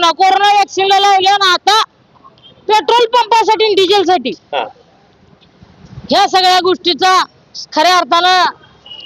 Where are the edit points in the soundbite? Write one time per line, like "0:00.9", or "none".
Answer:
none